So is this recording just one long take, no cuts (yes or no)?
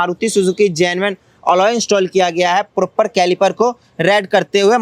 yes